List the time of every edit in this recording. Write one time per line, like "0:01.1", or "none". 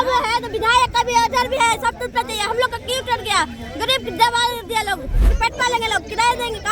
0:05.3